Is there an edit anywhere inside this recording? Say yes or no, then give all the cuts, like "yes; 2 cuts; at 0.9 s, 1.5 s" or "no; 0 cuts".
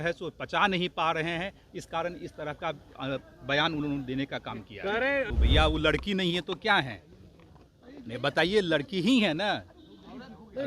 yes; 1 cut; at 5.3 s